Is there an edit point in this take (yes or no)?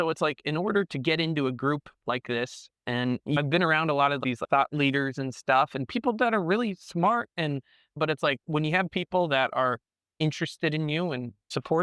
yes